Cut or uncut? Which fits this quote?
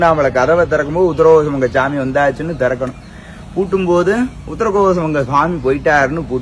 uncut